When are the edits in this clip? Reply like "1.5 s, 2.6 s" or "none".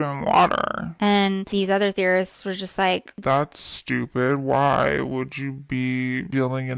1.4 s, 3.1 s